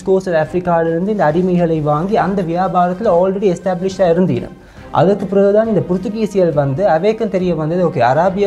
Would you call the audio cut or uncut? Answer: uncut